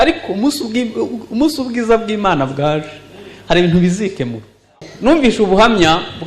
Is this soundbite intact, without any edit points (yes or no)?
no